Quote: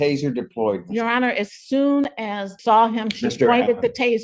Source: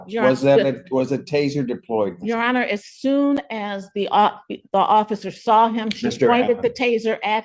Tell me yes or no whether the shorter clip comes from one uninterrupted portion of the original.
no